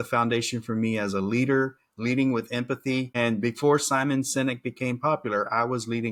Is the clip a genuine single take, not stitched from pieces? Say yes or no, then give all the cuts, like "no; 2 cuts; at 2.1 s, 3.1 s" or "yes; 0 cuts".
yes; 0 cuts